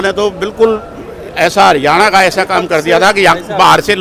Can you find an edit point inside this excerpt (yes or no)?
no